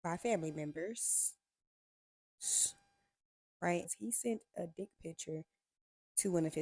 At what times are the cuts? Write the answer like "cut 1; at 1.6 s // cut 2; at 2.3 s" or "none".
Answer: cut 1; at 3.9 s